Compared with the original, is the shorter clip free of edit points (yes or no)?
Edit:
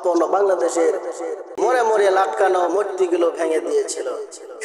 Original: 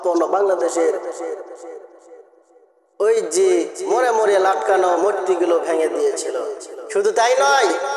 no